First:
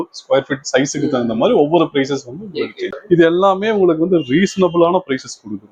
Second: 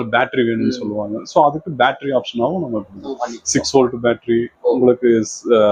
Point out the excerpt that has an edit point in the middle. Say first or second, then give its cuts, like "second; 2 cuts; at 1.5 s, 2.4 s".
first; 1 cut; at 3.0 s